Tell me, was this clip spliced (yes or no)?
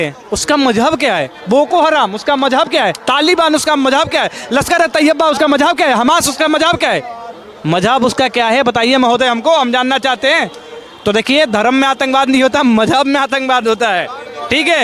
no